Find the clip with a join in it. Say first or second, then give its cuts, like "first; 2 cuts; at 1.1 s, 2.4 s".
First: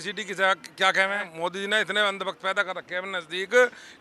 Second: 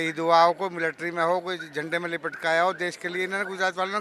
first; 1 cut; at 1.3 s